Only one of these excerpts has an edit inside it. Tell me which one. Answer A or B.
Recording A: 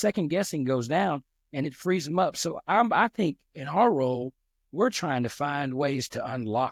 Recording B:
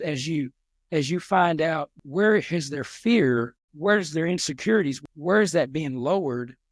B